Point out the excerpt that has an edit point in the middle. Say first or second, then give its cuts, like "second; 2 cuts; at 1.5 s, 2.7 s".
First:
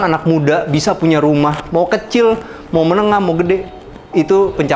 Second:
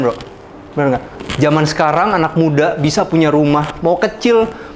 second; 1 cut; at 1.2 s